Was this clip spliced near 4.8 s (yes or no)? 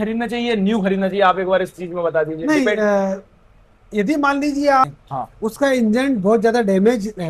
yes